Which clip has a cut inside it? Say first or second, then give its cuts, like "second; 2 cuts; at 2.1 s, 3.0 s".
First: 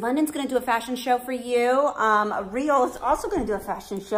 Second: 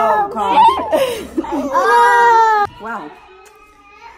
second; 1 cut; at 2.7 s